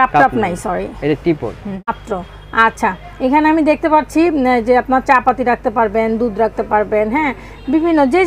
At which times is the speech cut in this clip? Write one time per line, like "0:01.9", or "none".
0:01.9

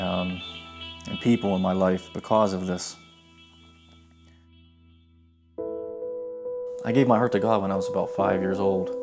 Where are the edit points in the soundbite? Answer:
0:02.9

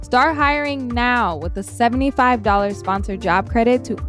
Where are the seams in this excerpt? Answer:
none

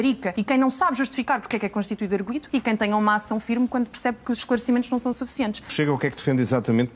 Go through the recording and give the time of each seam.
none

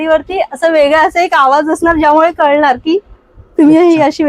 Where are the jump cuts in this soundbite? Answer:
none

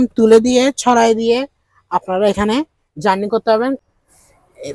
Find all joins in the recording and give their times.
0:03.8

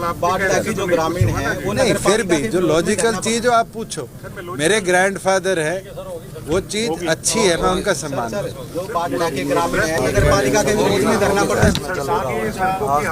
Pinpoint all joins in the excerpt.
0:11.8

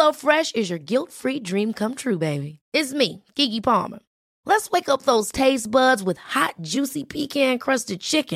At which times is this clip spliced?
none

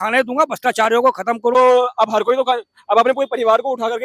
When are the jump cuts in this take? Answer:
0:01.5

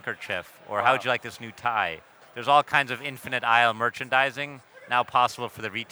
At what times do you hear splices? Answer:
0:02.2

